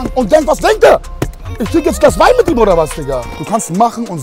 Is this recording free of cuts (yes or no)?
no